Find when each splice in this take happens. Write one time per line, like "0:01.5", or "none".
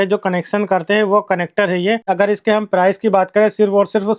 0:02.0